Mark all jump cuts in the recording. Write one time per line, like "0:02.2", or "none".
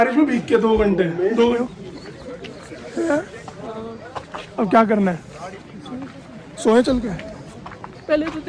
0:01.5